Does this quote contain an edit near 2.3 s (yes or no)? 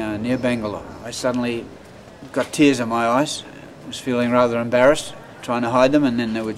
no